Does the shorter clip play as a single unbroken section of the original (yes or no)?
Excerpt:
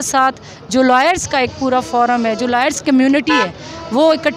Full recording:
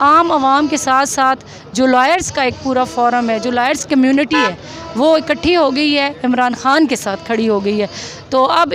yes